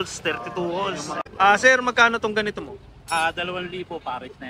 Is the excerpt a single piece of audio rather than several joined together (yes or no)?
no